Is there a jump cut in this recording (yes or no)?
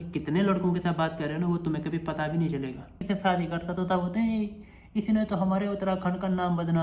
yes